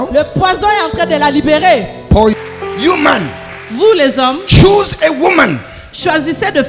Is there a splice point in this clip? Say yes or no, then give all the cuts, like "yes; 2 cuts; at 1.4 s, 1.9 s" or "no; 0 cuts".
yes; 1 cut; at 2.4 s